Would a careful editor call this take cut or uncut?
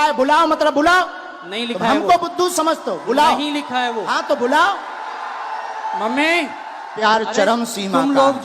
cut